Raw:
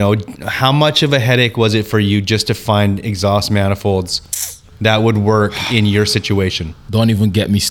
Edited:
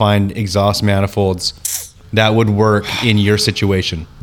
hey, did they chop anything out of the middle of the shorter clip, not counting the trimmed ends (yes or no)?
no